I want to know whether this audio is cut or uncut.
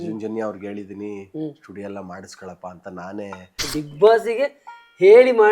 cut